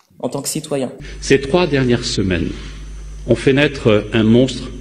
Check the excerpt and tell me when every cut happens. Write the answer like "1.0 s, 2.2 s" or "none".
1.1 s